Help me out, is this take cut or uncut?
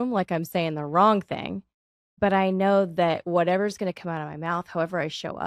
uncut